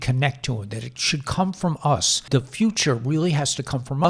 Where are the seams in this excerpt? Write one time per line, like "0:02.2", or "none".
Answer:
0:02.3